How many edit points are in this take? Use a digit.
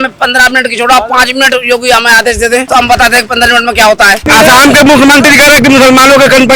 2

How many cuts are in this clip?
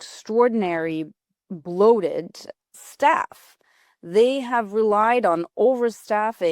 0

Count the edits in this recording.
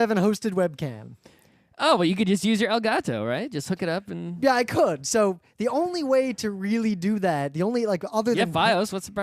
1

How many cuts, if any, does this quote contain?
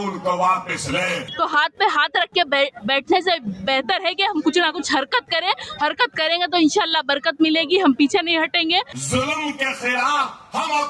2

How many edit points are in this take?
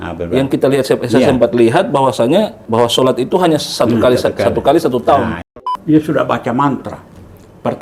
2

